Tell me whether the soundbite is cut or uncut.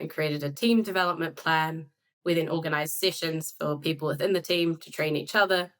uncut